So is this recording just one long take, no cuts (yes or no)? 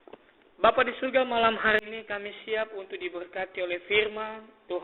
no